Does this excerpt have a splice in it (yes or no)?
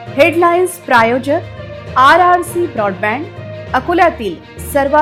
no